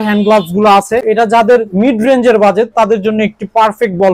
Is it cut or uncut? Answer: cut